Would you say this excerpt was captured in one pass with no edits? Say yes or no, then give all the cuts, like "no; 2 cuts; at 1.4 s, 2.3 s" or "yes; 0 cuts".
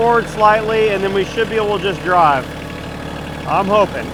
yes; 0 cuts